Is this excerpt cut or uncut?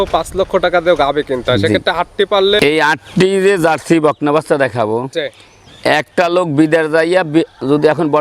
cut